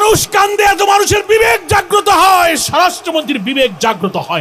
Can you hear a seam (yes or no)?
no